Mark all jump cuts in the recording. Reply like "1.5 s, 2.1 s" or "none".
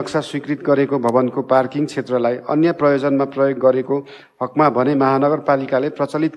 none